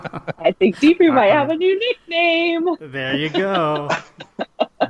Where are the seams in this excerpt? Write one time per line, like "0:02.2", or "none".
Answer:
none